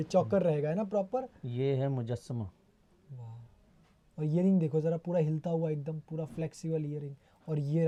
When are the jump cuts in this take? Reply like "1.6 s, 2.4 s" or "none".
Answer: none